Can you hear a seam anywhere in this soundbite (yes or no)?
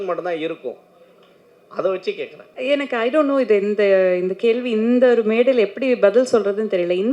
yes